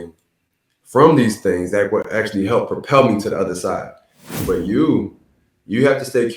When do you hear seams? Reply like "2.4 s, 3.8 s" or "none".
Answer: 4.4 s